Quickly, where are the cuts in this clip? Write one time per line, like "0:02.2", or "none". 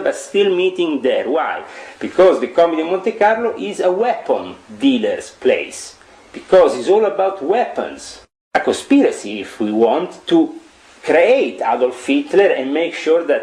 0:08.4